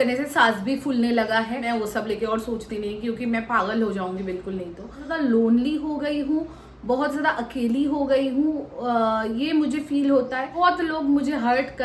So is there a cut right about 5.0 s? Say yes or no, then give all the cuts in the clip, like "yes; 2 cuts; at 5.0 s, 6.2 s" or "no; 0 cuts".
yes; 3 cuts; at 1.6 s, 5.0 s, 10.5 s